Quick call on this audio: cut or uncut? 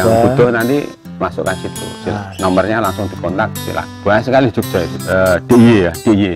cut